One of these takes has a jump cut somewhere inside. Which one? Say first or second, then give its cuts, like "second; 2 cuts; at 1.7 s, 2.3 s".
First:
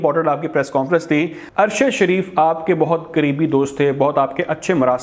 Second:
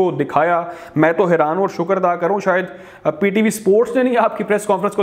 first; 1 cut; at 1.4 s